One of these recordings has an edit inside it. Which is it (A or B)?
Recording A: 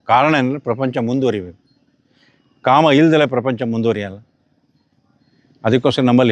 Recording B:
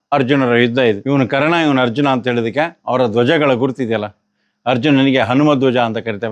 B